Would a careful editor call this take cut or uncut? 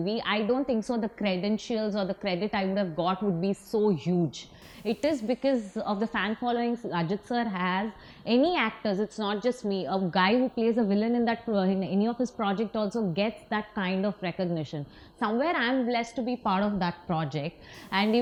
uncut